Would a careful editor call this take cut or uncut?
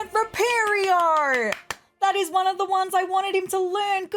uncut